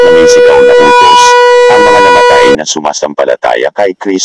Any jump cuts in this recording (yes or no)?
yes